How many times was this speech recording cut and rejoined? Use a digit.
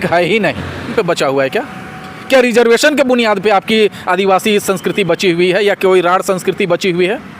1